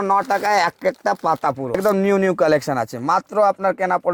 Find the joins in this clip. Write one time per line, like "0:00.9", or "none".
0:01.8